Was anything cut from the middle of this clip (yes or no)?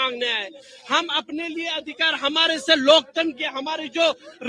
no